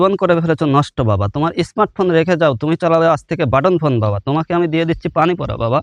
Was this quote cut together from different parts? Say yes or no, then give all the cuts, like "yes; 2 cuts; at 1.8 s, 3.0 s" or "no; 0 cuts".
no; 0 cuts